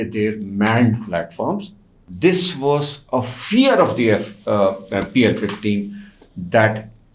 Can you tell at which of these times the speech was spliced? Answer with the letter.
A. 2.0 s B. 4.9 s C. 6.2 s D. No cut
A